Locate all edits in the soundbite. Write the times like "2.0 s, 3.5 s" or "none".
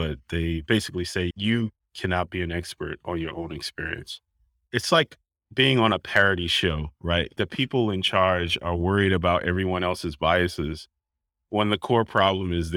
1.4 s, 4.7 s, 7.3 s